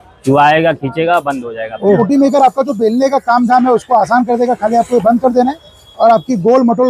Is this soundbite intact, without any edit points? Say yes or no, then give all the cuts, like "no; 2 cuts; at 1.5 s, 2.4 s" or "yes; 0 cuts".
no; 1 cut; at 2.0 s